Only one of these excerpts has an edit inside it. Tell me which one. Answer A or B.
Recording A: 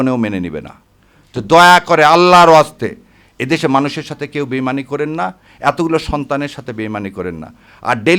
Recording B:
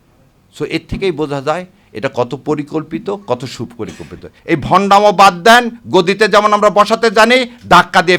B